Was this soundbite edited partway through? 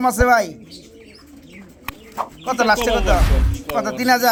no; 0 cuts

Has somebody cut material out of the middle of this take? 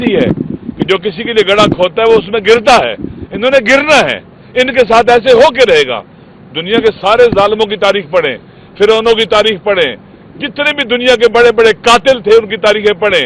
no; 0 cuts

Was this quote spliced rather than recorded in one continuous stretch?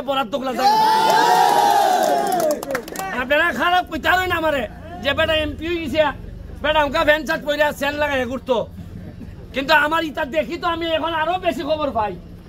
no; 0 cuts

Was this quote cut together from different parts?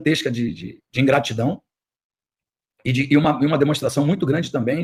no; 0 cuts

